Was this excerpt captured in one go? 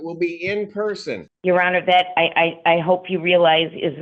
no; 1 cut; at 1.3 s

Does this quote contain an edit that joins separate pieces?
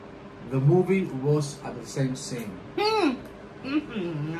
no; 0 cuts

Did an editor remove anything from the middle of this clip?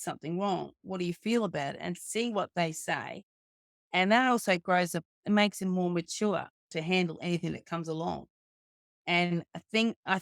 no; 0 cuts

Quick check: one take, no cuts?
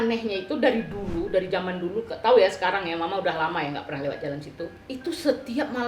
no; 1 cut; at 4.8 s

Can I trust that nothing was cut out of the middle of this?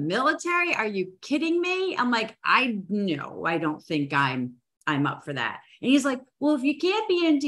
yes; 0 cuts

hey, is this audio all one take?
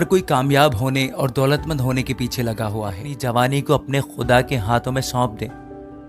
no; 1 cut; at 3.1 s

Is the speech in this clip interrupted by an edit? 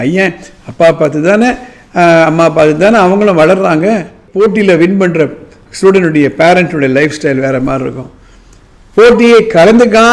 yes; 1 cut; at 4.2 s

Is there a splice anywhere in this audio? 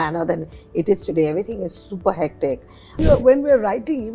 yes; 1 cut; at 3.0 s

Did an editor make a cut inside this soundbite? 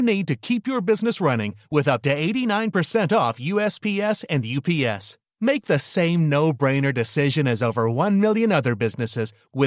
no; 0 cuts

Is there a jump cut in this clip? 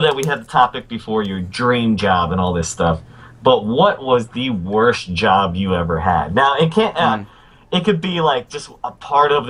no; 0 cuts

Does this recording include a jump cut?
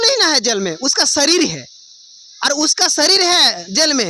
no; 0 cuts

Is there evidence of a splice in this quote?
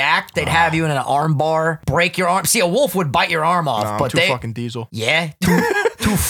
yes; 2 cuts; at 1.8 s, 4.8 s

